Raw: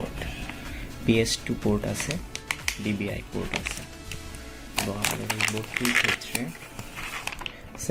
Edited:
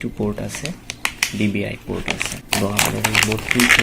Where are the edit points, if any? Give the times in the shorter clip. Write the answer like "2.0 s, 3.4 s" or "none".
2.3 s

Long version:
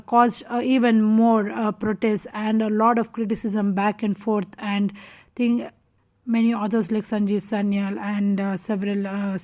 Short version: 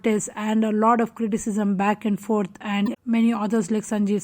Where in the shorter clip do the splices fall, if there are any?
2.9 s

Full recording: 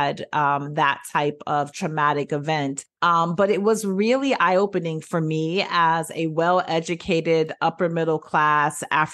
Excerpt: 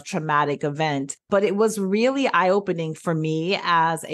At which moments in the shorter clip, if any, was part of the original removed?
1.3 s

